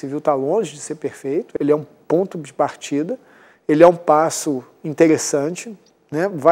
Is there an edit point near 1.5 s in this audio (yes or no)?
yes